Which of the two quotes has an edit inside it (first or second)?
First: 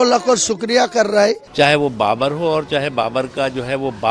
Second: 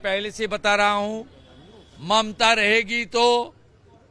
first